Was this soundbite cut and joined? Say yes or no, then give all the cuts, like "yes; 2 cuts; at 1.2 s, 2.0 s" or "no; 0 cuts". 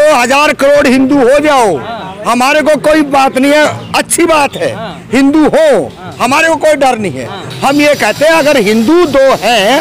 no; 0 cuts